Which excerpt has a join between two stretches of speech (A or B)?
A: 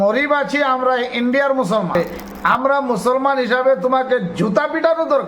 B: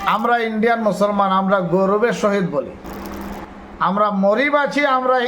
A